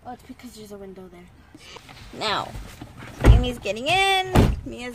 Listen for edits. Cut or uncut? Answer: cut